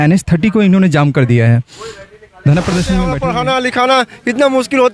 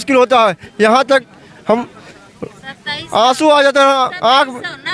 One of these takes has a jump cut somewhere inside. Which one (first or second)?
first